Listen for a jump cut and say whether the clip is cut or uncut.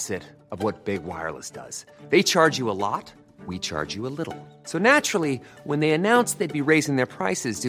uncut